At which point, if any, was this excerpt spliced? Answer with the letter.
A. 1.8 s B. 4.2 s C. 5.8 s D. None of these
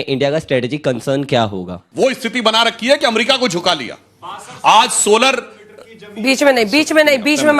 A